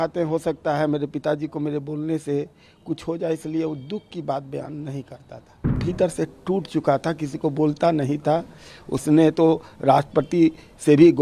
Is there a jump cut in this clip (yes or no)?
yes